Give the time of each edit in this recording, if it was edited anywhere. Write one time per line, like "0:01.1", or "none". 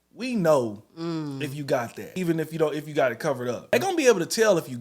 0:02.0
0:03.7

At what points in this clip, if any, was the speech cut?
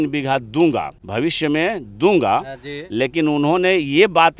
0:01.0

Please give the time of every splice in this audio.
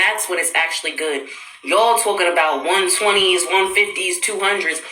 0:02.1

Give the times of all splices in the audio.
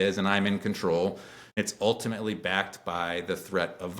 0:01.6

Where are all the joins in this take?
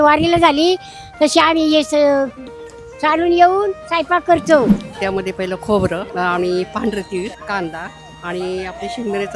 0:04.8
0:06.1
0:07.8

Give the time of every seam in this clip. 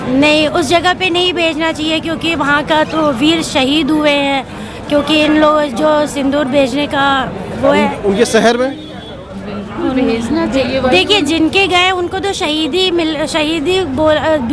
none

